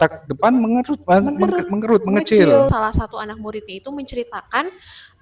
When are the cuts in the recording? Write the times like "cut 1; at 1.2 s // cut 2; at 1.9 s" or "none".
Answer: cut 1; at 2.7 s